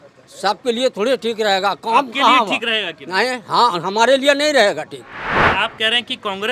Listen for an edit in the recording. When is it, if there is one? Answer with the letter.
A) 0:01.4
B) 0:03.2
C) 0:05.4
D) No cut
C